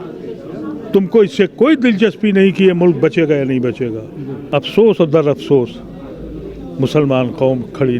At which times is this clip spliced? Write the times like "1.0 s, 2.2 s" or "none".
4.4 s